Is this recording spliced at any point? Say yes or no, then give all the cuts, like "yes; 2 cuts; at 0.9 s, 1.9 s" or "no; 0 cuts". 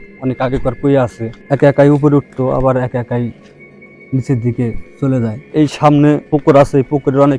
yes; 3 cuts; at 1.3 s, 5.4 s, 6.2 s